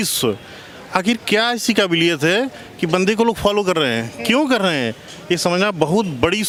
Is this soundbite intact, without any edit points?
yes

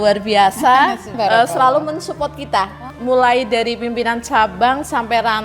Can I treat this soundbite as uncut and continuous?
no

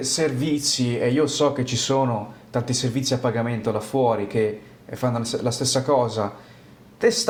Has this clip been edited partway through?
no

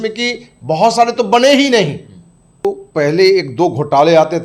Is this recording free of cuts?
no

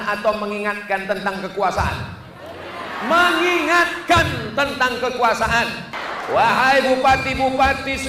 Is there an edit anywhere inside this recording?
yes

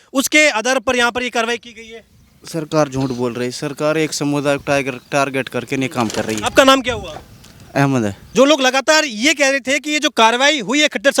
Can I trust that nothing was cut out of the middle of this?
no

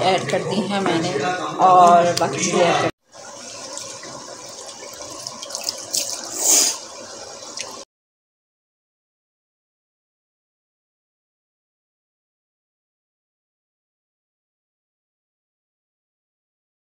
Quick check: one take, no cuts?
yes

